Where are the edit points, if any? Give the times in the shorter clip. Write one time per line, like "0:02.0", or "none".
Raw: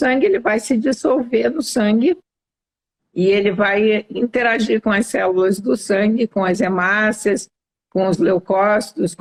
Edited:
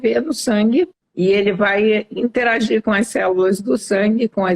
0:01.0